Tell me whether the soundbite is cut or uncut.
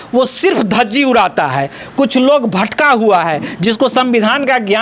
uncut